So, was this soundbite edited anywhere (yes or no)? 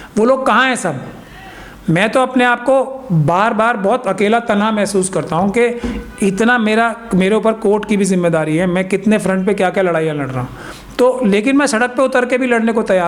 no